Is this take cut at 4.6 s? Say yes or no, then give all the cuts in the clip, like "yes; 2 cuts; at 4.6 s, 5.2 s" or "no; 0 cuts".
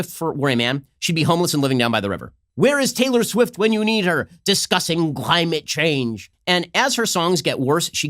no; 2 cuts; at 2.4 s, 6.2 s